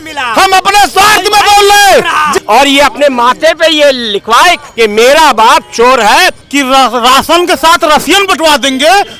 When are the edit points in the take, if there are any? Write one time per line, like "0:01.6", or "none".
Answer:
0:02.4
0:06.4